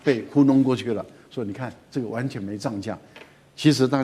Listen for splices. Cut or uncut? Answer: uncut